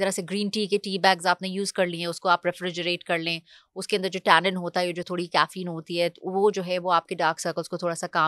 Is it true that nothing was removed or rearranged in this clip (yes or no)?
yes